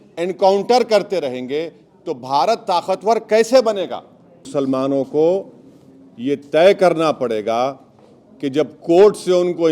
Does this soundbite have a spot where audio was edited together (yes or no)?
yes